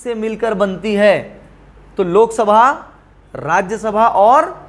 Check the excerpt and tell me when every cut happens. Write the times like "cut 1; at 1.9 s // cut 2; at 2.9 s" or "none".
none